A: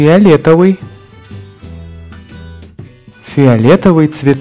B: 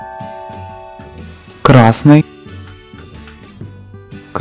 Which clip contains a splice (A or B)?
B